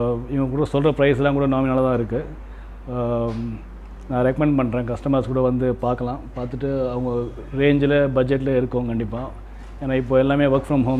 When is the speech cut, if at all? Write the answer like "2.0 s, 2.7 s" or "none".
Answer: none